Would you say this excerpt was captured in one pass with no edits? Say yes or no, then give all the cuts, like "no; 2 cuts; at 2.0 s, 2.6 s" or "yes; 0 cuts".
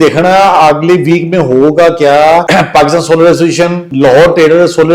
no; 2 cuts; at 2.5 s, 3.8 s